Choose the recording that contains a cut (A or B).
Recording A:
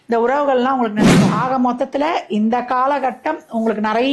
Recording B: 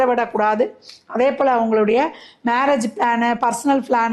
A